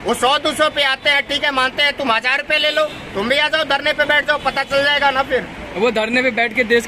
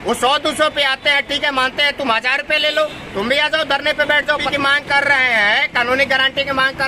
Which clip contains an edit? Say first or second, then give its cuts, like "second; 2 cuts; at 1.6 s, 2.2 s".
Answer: second; 1 cut; at 4.5 s